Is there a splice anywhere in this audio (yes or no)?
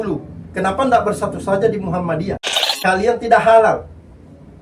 yes